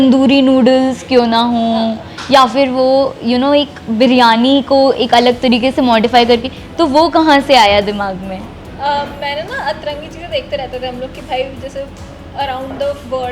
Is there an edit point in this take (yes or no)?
no